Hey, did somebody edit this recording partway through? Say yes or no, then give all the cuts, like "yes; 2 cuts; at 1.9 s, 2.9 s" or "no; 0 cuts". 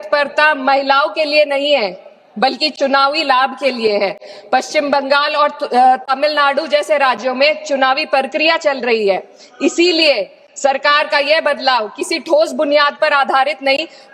no; 0 cuts